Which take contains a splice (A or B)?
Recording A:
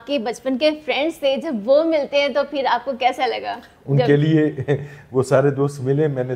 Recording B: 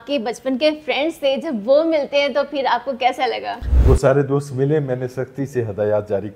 B